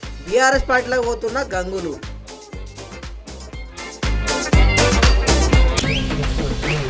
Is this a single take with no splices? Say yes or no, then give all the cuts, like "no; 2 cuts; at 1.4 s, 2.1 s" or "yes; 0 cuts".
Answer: no; 1 cut; at 5.8 s